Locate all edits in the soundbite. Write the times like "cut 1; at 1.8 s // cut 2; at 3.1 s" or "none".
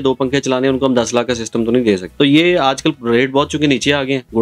cut 1; at 2.1 s